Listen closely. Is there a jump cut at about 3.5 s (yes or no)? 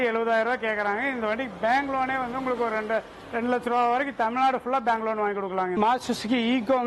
no